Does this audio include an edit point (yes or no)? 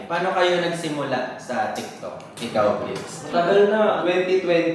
yes